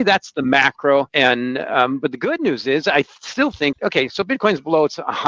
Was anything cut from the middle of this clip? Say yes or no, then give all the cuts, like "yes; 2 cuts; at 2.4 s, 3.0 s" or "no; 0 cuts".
yes; 2 cuts; at 1.1 s, 3.8 s